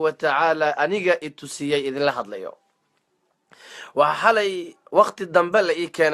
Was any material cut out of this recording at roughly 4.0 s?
yes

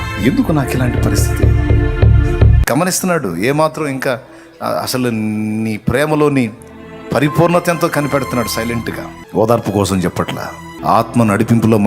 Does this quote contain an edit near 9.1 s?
yes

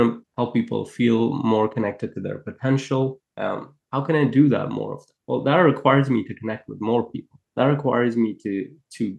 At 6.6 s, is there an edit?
no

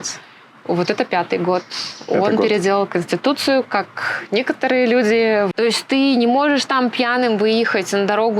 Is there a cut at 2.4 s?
no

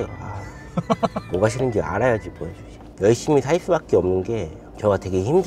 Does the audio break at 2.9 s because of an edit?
yes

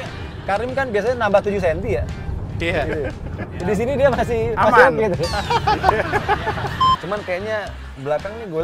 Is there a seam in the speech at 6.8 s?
yes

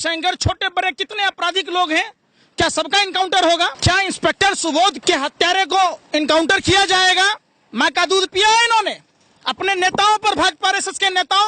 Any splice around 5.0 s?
yes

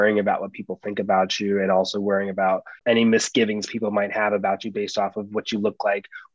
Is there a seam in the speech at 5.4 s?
no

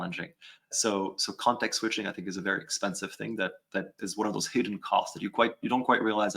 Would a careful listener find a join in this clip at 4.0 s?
yes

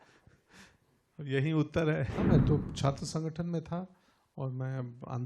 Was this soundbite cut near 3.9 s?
no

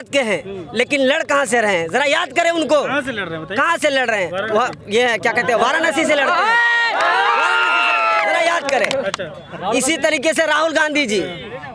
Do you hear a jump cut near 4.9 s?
no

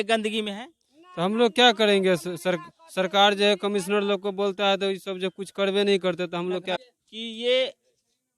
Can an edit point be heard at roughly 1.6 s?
no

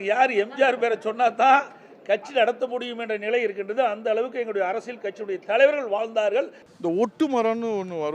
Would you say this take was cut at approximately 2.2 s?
no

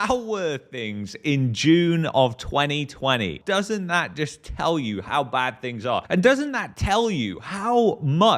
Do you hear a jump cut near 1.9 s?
no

